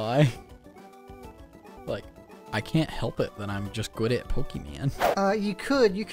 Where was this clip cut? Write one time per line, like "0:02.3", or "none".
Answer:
0:01.8
0:05.0